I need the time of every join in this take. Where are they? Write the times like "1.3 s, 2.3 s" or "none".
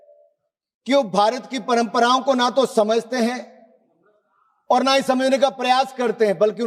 none

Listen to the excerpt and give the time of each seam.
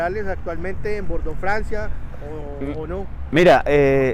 none

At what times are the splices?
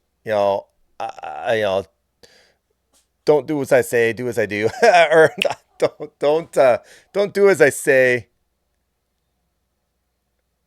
none

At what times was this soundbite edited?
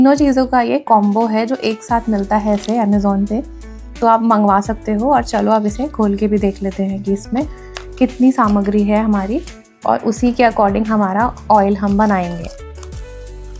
12.5 s

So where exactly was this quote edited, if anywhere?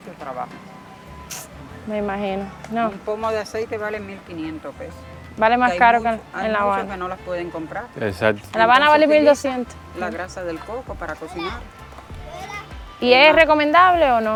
none

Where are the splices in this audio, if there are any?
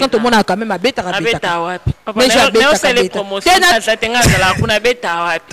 3.7 s

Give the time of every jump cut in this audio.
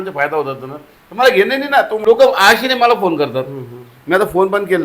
1.9 s

